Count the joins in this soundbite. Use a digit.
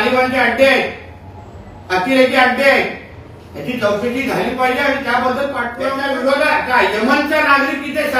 1